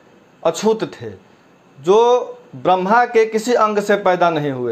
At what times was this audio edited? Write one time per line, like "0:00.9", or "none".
none

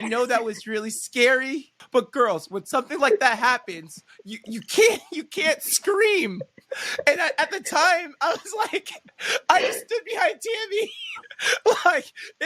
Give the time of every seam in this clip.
0:01.7

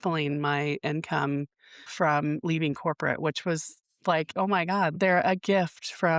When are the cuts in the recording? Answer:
0:04.9

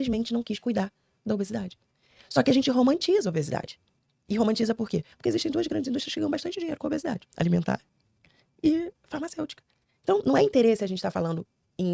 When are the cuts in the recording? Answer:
none

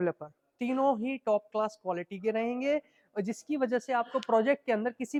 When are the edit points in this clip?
none

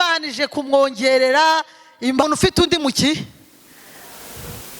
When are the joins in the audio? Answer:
0:02.2

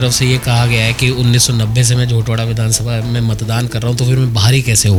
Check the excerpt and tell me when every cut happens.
none

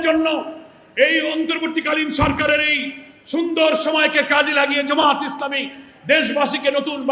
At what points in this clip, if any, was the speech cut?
none

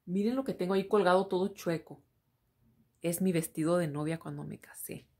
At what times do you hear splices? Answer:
none

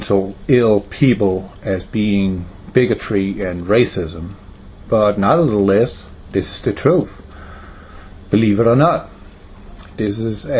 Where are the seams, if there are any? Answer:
0:07.6

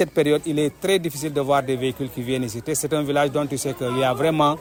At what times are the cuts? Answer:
none

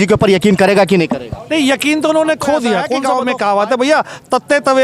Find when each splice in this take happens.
0:03.0

